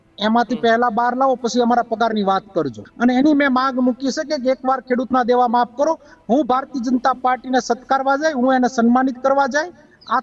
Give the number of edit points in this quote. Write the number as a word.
one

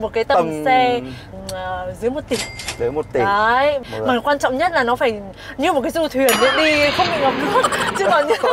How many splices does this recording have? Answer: two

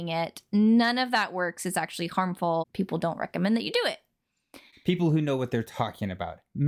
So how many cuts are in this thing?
zero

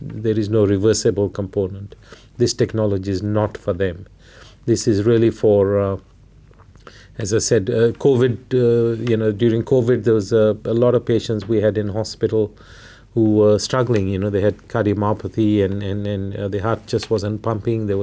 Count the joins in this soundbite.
zero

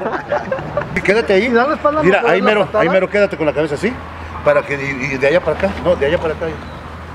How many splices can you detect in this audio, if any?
one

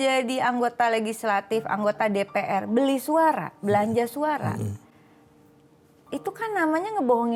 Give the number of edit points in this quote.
zero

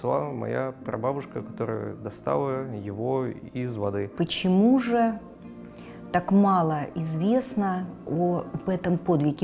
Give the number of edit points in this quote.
one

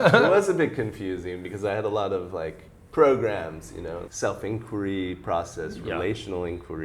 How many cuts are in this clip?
one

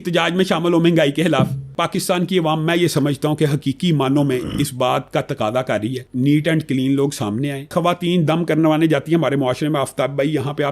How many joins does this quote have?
three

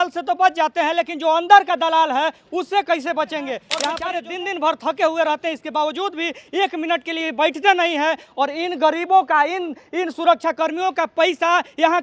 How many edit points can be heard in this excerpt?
one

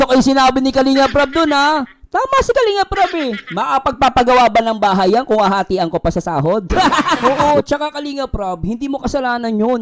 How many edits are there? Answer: one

